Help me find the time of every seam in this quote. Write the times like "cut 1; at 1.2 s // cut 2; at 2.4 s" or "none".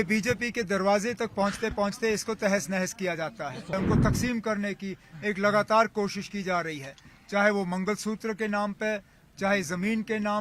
cut 1; at 3.7 s